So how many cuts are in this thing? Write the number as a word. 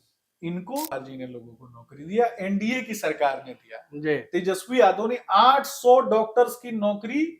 one